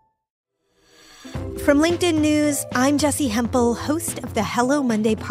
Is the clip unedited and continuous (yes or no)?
yes